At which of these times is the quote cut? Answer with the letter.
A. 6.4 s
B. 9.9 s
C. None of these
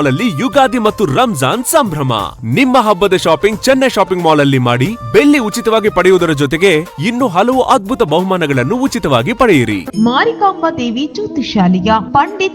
B